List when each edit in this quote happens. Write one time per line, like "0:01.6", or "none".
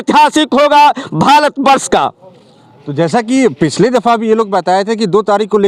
none